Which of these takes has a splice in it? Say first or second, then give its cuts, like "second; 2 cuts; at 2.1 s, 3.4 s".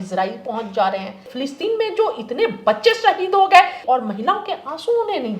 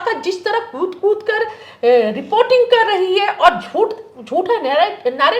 first; 2 cuts; at 1.3 s, 3.8 s